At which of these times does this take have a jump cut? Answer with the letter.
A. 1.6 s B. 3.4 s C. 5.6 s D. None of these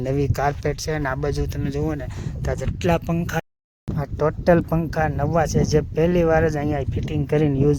B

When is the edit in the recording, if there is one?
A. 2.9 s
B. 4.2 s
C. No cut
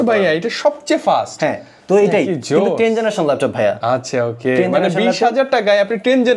C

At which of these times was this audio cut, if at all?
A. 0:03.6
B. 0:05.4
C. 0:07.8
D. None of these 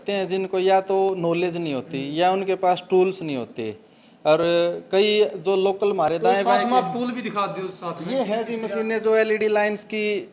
D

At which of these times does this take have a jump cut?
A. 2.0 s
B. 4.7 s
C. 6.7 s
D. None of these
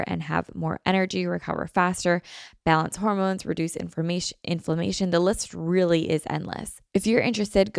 C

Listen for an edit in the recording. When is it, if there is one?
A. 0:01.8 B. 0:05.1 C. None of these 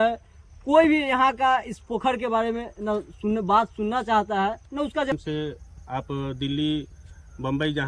B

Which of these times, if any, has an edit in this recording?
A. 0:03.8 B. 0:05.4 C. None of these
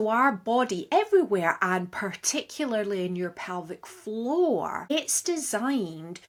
C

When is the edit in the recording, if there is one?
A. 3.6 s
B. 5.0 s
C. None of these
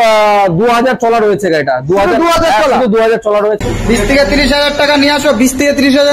A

